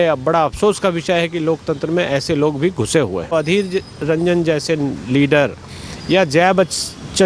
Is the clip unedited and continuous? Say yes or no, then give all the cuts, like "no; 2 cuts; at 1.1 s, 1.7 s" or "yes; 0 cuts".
no; 1 cut; at 3.3 s